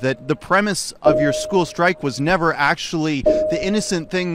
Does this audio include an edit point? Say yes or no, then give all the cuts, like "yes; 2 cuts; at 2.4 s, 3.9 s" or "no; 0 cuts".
no; 0 cuts